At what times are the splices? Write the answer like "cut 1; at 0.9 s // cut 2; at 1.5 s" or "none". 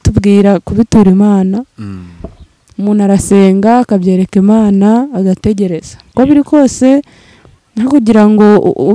cut 1; at 6.0 s